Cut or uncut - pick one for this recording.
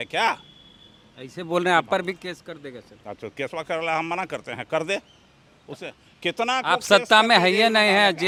uncut